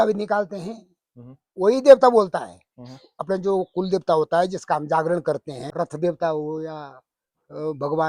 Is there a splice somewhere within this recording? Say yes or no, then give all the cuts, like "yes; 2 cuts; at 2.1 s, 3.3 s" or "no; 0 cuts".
yes; 1 cut; at 5.6 s